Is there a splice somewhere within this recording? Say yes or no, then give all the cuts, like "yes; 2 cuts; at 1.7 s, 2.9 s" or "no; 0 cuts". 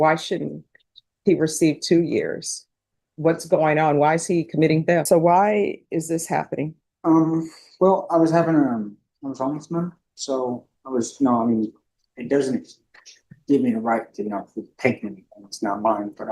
yes; 1 cut; at 5.1 s